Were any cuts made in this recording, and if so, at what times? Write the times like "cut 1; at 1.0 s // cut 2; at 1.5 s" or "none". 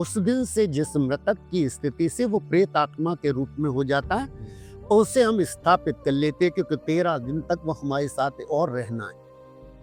none

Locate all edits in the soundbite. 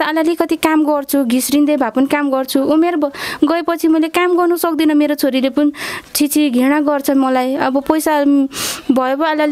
none

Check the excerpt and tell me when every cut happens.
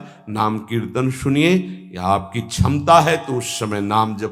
none

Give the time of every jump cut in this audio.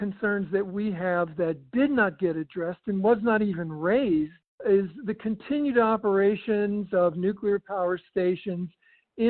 cut 1; at 4.4 s

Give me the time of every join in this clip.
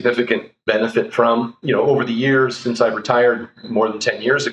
cut 1; at 1.6 s

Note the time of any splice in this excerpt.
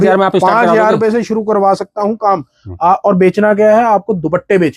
none

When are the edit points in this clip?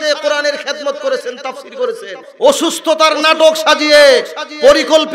cut 1; at 2.2 s

